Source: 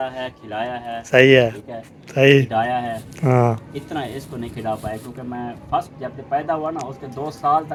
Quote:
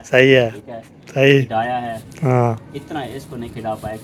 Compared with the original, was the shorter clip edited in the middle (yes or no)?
no